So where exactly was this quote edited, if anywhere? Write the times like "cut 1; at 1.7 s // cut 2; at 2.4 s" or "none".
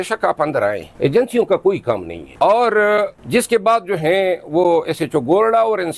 none